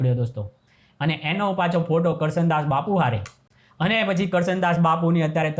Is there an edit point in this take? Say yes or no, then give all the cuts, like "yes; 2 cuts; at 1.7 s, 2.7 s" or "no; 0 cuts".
no; 0 cuts